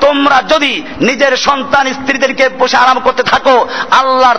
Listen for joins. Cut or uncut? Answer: uncut